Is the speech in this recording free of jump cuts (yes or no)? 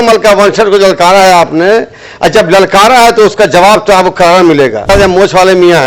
no